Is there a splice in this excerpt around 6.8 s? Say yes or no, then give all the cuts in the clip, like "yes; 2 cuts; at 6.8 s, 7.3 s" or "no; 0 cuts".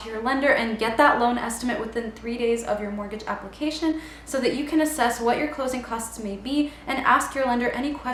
no; 0 cuts